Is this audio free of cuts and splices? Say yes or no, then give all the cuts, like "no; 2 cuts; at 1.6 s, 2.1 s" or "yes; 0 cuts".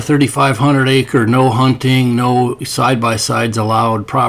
yes; 0 cuts